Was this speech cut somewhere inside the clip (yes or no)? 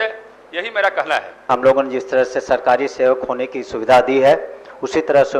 yes